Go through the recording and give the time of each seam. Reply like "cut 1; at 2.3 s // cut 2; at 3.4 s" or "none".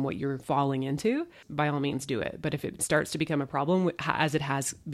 cut 1; at 1.4 s